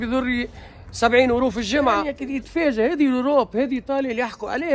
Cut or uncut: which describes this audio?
cut